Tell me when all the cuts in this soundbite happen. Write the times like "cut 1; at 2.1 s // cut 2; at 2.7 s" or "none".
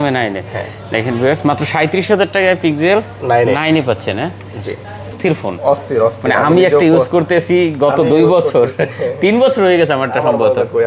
cut 1; at 5.1 s